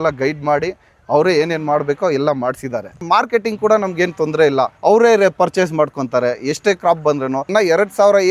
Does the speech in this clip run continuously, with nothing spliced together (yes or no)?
no